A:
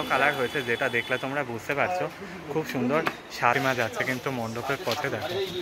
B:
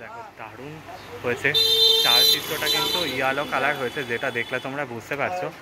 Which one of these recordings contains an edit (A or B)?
A